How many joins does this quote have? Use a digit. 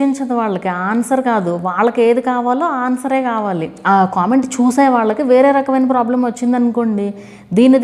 1